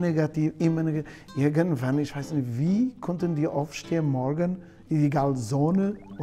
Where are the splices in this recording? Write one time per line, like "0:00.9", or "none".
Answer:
none

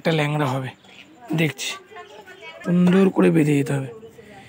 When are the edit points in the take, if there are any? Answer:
0:02.6

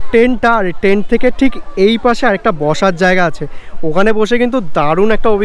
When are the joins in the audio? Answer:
none

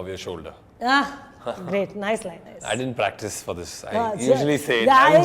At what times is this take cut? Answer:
0:02.5

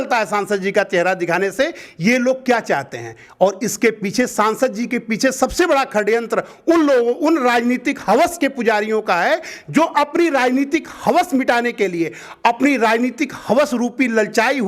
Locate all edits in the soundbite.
none

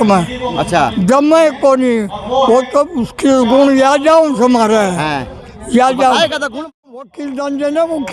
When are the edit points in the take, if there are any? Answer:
0:06.7

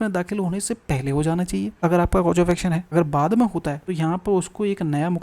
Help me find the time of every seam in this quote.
0:01.7
0:02.9
0:03.8

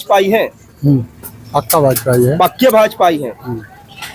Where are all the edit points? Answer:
none

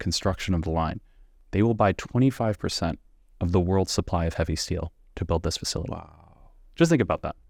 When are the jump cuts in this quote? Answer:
none

